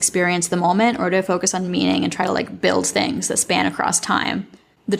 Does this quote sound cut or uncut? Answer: uncut